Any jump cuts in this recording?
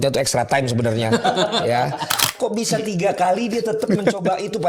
yes; 1 cut; at 2.3 s

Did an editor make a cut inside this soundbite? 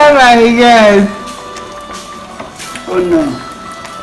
no; 0 cuts

